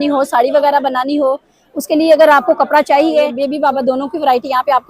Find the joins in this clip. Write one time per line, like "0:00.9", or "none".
0:03.4